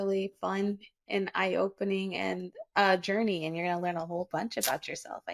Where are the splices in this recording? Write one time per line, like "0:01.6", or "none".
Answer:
none